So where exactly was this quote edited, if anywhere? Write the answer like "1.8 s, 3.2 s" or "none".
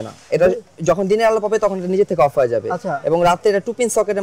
none